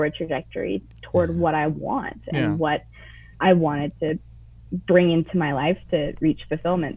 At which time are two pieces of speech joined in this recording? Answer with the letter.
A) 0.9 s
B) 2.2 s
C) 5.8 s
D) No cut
D